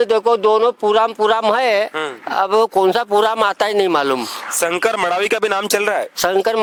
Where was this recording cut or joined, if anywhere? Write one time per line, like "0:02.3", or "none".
none